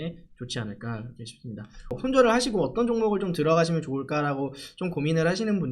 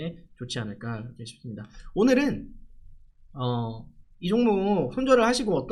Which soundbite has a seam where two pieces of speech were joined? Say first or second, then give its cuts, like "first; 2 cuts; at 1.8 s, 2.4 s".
first; 1 cut; at 1.9 s